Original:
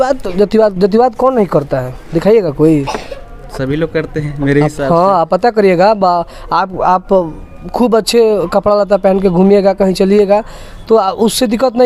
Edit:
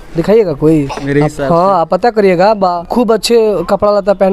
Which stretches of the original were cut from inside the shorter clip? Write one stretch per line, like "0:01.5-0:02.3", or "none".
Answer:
0:03.0-0:04.4
0:06.2-0:07.7

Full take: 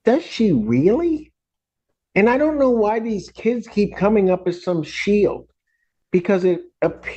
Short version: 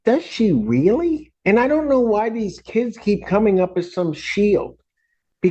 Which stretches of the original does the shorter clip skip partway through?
0:01.3-0:02.0

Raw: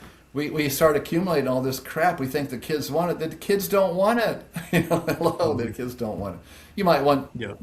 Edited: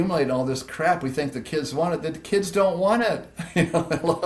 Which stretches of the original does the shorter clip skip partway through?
none

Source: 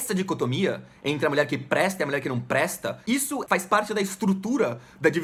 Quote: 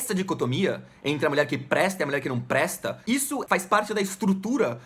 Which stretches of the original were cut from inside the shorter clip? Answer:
none

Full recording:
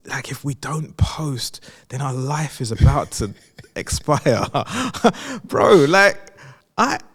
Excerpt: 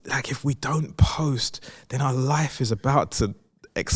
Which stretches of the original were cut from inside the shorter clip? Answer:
none

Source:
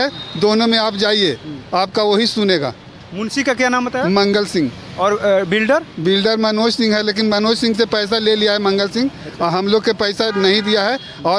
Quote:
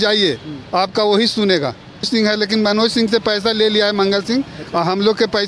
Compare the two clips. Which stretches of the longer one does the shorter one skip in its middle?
0:03.1-0:06.7

